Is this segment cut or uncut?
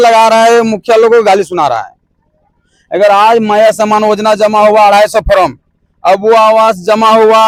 uncut